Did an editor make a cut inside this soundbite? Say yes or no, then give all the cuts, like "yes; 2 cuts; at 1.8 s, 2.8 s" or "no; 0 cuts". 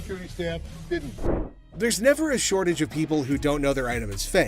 yes; 1 cut; at 1.2 s